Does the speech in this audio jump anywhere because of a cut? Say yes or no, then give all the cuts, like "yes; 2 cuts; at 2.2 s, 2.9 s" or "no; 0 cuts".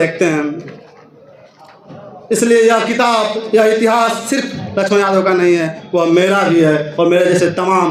no; 0 cuts